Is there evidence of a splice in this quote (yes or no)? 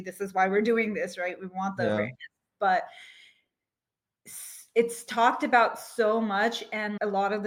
no